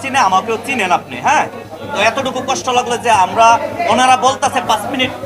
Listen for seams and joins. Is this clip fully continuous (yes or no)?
yes